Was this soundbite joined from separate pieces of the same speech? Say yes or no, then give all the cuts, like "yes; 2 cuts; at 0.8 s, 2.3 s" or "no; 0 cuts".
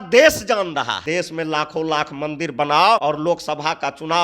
yes; 2 cuts; at 1.0 s, 3.0 s